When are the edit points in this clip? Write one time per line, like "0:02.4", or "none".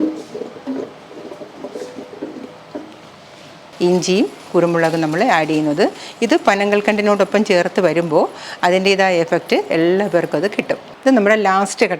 0:03.7
0:10.9